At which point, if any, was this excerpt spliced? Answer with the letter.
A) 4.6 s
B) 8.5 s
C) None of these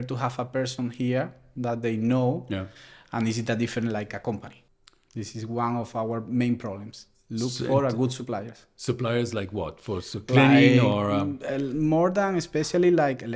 A